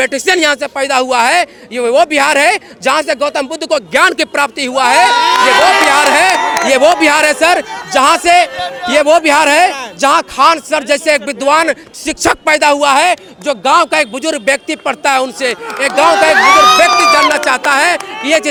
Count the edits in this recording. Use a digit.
0